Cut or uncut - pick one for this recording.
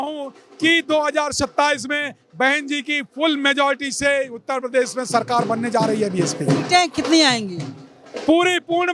uncut